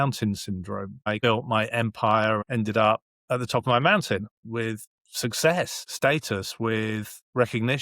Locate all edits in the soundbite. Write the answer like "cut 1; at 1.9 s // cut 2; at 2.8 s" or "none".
cut 1; at 1.1 s // cut 2; at 2.4 s // cut 3; at 4.4 s // cut 4; at 5.8 s